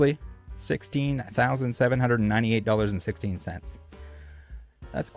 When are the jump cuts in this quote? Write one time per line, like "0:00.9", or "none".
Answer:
none